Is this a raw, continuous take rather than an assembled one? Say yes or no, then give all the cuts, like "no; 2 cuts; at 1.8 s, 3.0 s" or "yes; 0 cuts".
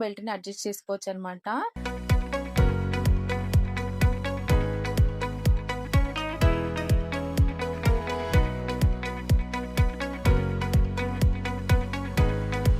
no; 1 cut; at 1.7 s